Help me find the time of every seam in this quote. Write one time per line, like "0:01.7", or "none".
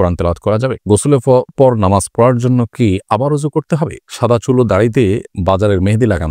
0:00.9
0:04.0
0:05.3

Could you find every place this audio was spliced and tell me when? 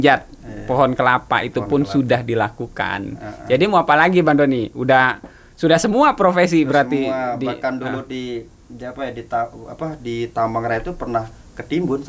none

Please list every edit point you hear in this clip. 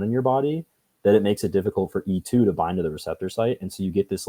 none

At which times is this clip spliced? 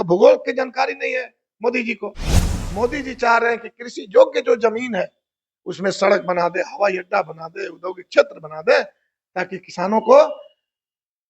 0:02.4

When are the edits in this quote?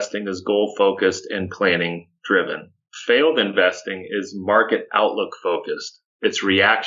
none

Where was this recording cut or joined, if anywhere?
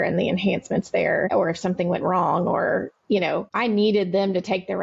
0:01.3
0:03.5

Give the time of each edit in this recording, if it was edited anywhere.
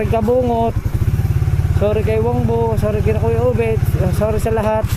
none

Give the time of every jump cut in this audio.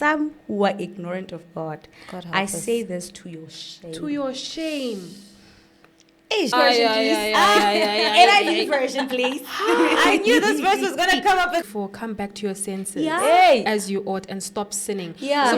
0:06.5
0:11.6

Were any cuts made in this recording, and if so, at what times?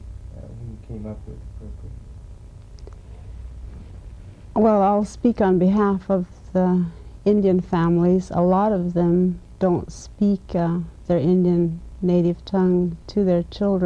0:11.9

